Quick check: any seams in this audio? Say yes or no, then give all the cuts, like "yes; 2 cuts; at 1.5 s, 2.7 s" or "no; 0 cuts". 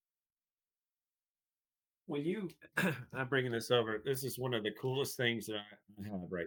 no; 0 cuts